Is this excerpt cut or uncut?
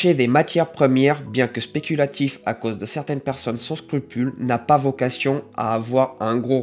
uncut